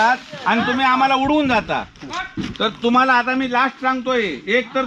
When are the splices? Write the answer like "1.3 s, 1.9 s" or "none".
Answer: 2.4 s

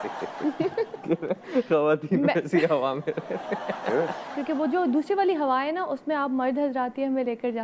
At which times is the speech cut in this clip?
1.0 s, 4.4 s

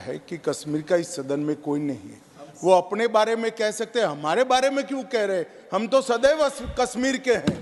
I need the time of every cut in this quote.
none

